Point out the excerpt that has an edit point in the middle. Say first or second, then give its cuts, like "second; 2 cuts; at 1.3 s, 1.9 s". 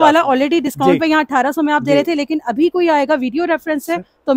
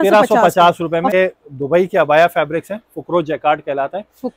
second; 1 cut; at 1.1 s